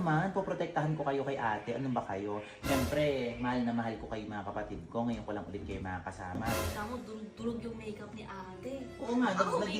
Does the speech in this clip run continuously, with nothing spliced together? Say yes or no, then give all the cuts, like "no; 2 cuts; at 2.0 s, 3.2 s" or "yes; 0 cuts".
no; 1 cut; at 6.7 s